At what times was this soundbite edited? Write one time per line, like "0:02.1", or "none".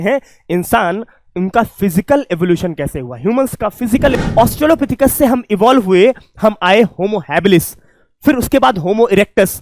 0:04.1